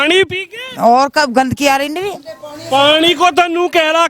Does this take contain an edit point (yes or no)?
no